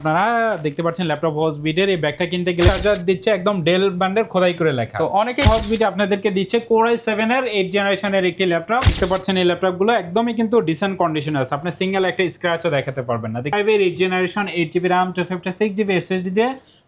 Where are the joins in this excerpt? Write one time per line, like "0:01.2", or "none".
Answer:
0:02.7
0:05.4
0:08.9
0:13.5